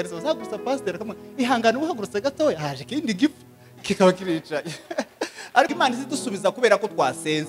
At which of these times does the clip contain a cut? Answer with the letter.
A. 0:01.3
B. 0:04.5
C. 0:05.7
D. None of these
C